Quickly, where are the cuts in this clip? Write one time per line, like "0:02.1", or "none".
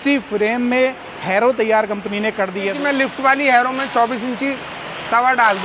0:02.8